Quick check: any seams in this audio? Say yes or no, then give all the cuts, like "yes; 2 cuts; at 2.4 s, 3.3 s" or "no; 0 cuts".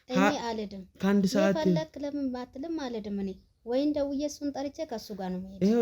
no; 0 cuts